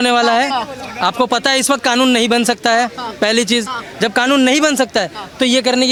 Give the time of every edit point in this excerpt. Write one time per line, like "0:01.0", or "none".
none